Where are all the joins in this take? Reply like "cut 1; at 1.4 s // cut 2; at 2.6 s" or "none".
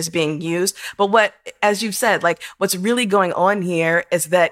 none